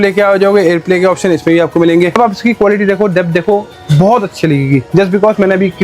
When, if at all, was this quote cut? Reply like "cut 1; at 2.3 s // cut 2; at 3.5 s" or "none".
cut 1; at 2.1 s